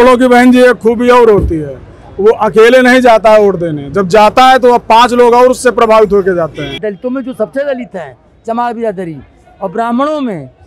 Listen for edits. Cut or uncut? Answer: cut